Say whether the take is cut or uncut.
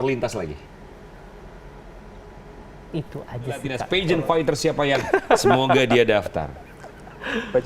cut